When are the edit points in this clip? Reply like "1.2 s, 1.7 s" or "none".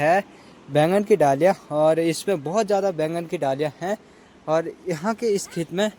none